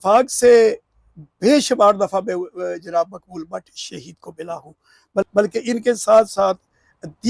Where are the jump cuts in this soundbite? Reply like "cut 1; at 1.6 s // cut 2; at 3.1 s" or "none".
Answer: cut 1; at 5.3 s

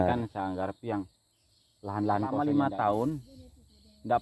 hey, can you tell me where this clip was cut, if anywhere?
cut 1; at 2.3 s

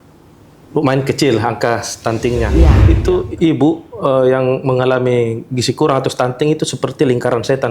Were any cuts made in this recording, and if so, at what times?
cut 1; at 2.8 s

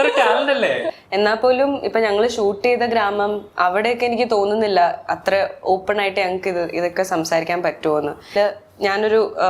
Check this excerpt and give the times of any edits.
cut 1; at 0.9 s // cut 2; at 8.2 s

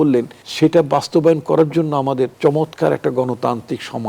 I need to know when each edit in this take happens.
cut 1; at 2.3 s

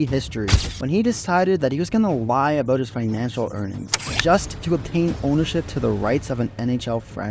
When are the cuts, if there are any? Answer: none

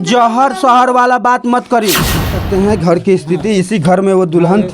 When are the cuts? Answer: cut 1; at 2.2 s

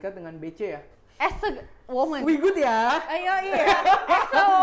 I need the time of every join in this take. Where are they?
cut 1; at 1.0 s

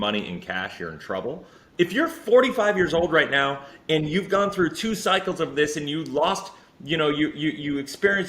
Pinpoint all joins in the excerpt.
cut 1; at 1.6 s

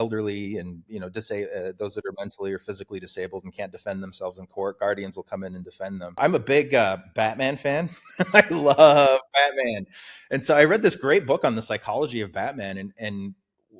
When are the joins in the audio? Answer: cut 1; at 6.2 s

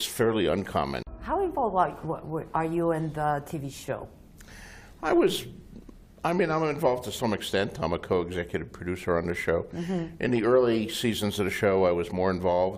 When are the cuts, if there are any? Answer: cut 1; at 1.0 s

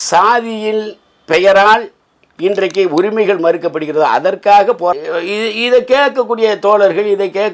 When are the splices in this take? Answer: cut 1; at 4.9 s

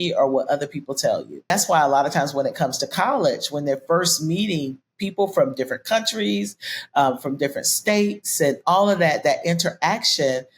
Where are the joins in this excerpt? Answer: cut 1; at 1.5 s

